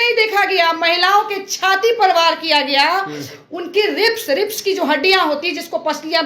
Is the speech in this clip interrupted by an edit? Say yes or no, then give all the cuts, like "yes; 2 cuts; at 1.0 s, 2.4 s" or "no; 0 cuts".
no; 0 cuts